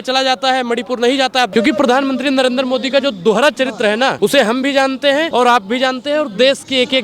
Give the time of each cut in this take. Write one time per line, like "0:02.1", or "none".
0:01.5
0:04.1
0:05.3